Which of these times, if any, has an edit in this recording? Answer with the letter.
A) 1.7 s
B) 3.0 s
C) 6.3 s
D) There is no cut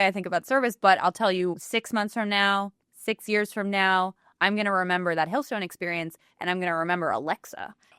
A